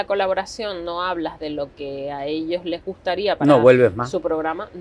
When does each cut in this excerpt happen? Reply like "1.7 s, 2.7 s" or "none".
none